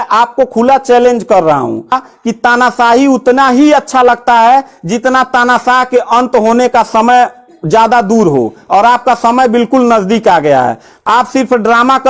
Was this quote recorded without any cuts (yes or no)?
no